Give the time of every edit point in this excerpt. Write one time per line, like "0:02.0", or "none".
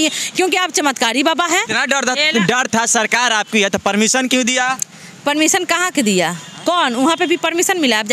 0:01.7